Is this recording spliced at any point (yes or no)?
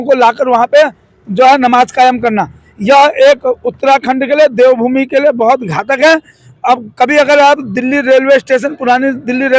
no